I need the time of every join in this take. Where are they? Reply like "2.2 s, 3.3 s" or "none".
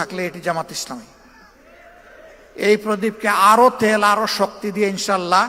none